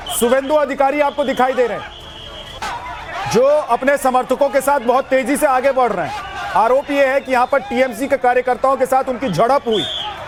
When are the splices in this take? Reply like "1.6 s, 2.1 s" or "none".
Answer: none